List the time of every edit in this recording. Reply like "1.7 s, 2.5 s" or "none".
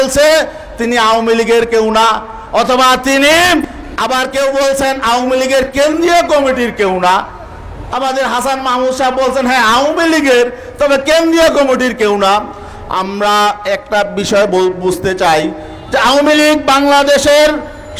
3.8 s